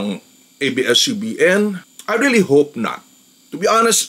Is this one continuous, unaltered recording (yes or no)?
yes